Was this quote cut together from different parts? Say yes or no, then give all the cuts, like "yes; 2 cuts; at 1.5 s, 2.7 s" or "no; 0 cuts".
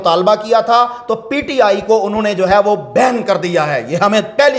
no; 0 cuts